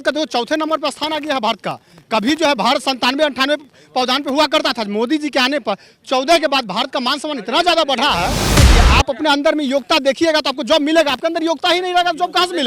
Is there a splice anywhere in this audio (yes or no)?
yes